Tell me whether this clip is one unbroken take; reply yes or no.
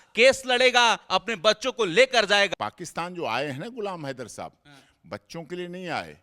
no